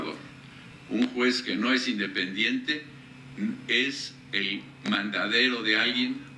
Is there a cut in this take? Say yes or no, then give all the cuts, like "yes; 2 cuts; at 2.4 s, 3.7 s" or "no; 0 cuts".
no; 0 cuts